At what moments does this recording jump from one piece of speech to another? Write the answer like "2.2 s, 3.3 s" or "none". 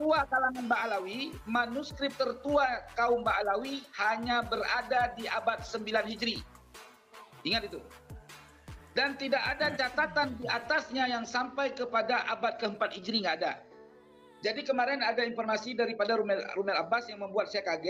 none

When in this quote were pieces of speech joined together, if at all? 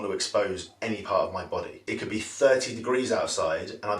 1.8 s

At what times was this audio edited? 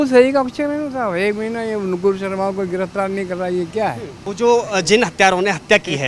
4.2 s

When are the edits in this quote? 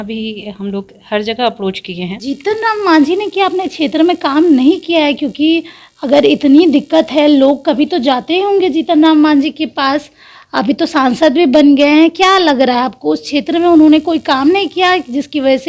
2.2 s

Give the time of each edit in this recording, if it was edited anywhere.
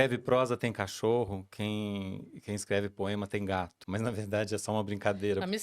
3.8 s

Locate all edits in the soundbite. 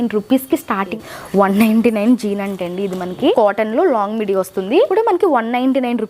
1.0 s, 3.3 s, 4.9 s

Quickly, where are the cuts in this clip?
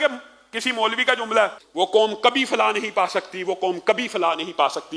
1.6 s

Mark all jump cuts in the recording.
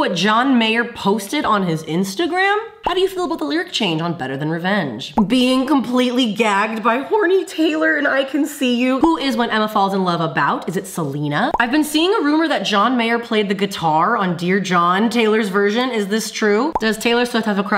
2.8 s, 5.1 s, 9.0 s, 11.5 s, 16.7 s

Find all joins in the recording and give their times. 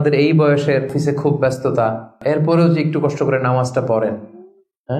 0.9 s, 2.2 s

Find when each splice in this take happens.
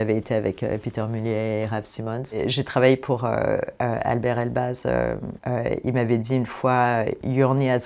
2.4 s, 5.3 s

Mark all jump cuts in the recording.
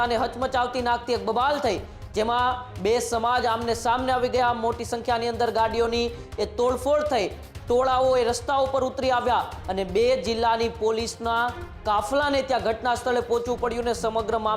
none

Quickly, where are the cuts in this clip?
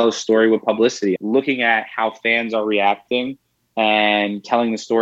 1.2 s

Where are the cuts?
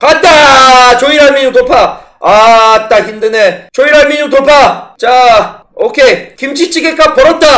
6.3 s

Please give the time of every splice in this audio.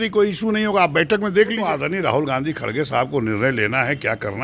1.6 s

